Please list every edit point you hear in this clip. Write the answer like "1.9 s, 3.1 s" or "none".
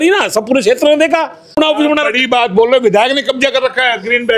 1.5 s